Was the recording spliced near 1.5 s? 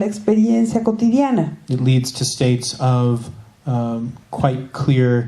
no; 1 cut; at 4.1 s

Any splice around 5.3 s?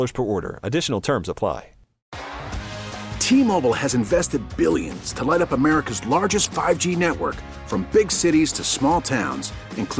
no; 1 cut; at 2.2 s

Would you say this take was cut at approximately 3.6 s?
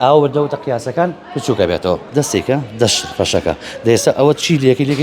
no; 1 cut; at 2.0 s

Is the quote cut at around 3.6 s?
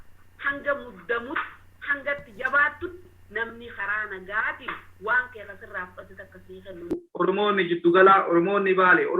no; 1 cut; at 7.1 s

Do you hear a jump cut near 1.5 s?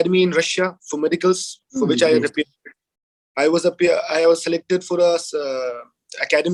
no; 0 cuts

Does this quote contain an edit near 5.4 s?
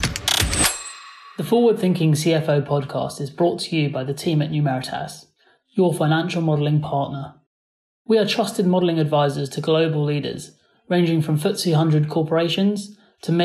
no; 1 cut; at 1.2 s

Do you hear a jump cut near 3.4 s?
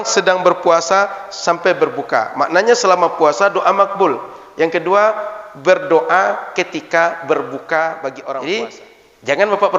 no; 1 cut; at 8.2 s

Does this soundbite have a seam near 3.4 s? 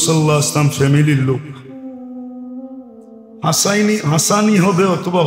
yes; 2 cuts; at 1.7 s, 3.4 s

